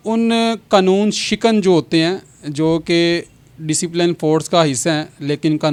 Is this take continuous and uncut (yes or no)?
yes